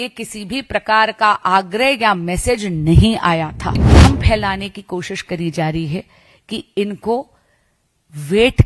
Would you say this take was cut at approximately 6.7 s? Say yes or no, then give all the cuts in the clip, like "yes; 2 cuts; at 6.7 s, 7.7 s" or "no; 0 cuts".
no; 1 cut; at 3.9 s